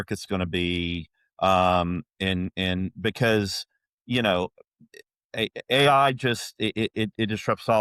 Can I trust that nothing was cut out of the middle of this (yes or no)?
yes